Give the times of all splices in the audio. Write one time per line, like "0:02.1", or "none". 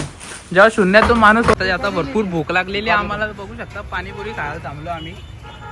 0:01.5